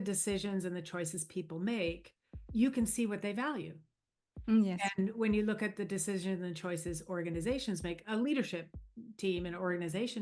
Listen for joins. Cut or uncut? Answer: uncut